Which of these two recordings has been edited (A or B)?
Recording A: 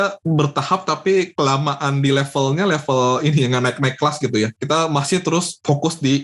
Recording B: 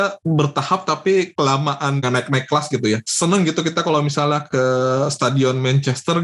B